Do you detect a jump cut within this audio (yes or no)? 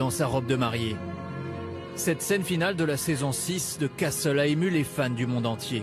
no